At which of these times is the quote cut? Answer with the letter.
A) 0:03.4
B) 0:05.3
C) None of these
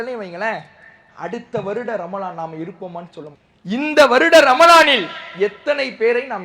A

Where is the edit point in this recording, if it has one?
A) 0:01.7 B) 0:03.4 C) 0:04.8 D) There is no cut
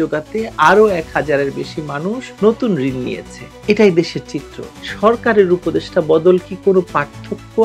C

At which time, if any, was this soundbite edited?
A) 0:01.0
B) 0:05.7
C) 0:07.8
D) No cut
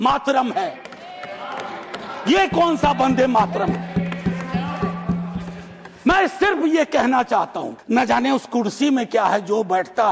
C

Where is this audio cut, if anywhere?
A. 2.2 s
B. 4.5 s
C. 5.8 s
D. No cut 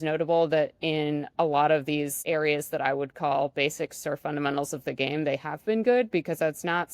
A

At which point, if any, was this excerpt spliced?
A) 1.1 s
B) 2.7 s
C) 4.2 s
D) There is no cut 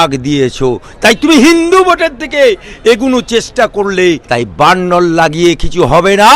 C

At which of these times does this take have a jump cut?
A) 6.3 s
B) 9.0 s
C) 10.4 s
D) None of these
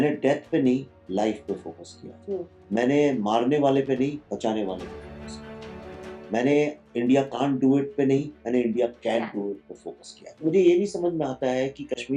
C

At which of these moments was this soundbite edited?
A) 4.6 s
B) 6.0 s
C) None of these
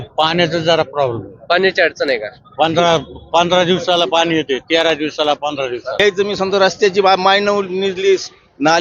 B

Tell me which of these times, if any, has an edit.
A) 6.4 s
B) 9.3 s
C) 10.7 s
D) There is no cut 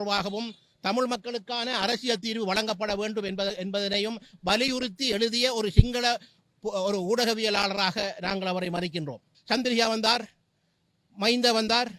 B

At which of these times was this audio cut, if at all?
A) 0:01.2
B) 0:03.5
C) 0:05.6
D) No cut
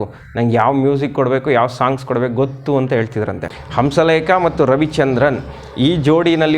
B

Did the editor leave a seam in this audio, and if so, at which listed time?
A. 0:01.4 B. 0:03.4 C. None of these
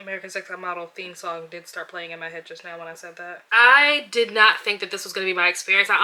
B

